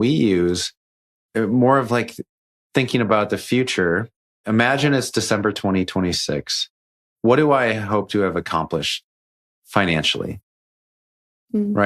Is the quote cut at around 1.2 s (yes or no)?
no